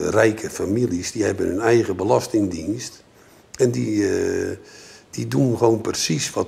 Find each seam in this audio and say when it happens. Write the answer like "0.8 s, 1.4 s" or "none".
none